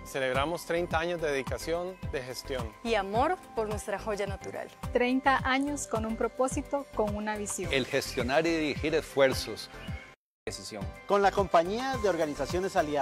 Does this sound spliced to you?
yes; 1 cut; at 10.3 s

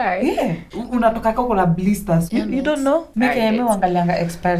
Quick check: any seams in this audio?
yes; 1 cut; at 3.1 s

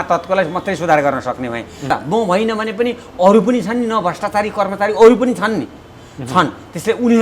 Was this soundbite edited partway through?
yes; 1 cut; at 1.9 s

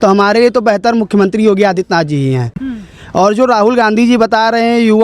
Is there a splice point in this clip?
no; 0 cuts

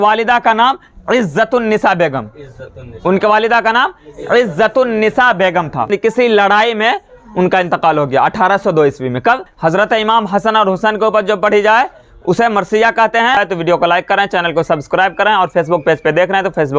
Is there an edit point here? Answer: yes; 3 cuts; at 5.9 s, 9.5 s, 13.4 s

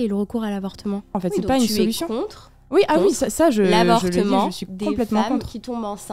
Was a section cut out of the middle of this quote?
yes; 1 cut; at 1.2 s

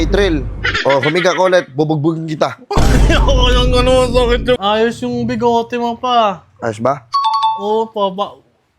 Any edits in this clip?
yes; 1 cut; at 4.6 s

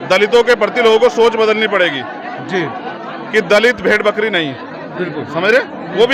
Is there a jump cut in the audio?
no; 0 cuts

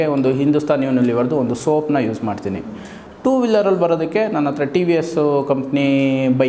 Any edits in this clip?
yes; 1 cut; at 3.0 s

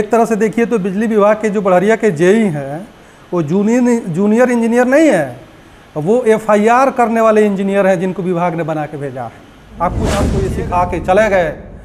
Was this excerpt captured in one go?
no; 1 cut; at 10.4 s

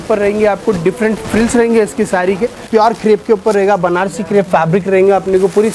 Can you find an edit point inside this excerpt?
yes; 1 cut; at 2.7 s

